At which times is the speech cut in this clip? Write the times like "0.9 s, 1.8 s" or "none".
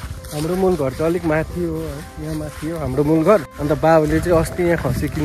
none